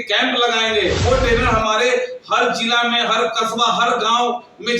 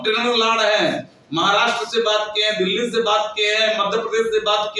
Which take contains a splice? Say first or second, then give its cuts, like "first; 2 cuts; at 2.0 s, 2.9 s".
first; 1 cut; at 1.0 s